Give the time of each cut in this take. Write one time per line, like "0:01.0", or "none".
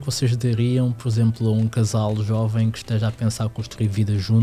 none